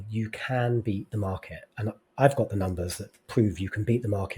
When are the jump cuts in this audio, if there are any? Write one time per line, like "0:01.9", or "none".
none

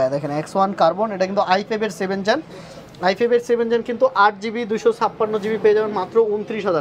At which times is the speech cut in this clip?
none

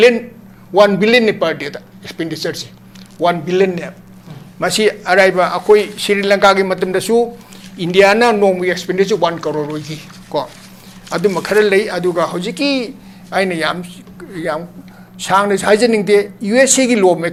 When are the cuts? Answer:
none

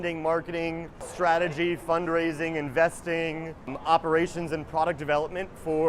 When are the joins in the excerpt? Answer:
0:01.1
0:03.8

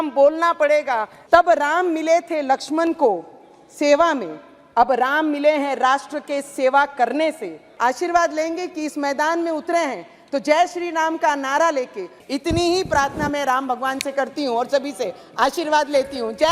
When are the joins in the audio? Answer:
0:01.1
0:07.6
0:12.2

